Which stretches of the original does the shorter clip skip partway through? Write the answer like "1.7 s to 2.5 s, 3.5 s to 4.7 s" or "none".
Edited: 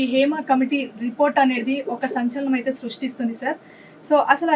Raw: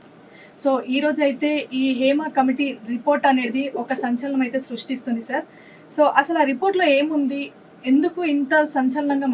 none